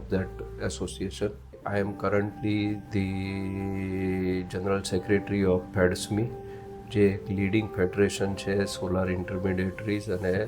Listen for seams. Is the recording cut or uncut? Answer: cut